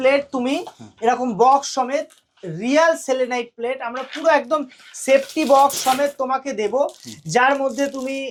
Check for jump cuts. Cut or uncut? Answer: uncut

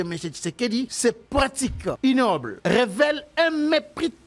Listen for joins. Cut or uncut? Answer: cut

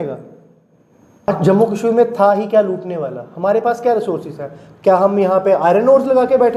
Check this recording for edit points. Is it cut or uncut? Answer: cut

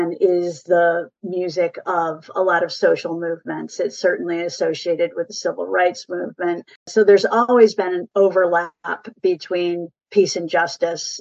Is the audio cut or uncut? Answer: cut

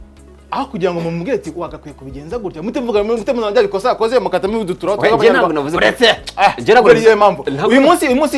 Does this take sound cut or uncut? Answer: uncut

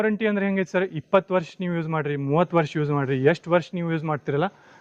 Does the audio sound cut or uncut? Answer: uncut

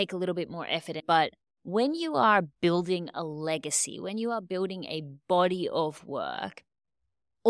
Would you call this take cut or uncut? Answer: cut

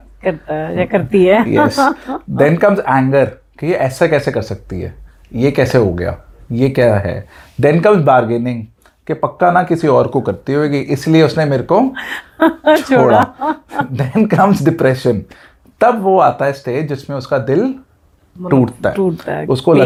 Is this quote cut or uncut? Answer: uncut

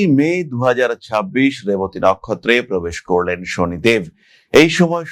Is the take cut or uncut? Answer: uncut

